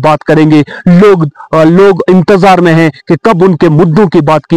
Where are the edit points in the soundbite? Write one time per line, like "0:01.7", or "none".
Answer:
none